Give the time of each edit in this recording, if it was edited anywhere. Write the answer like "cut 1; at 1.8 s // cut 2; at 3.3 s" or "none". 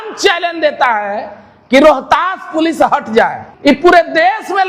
cut 1; at 3.5 s